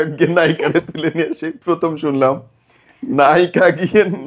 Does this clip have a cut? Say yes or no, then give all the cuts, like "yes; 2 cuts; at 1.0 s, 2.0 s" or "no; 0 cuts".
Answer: no; 0 cuts